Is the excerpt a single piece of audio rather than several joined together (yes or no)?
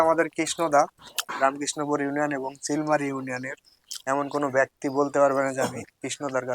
no